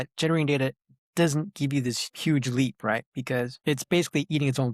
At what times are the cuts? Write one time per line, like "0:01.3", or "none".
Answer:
0:02.1
0:03.5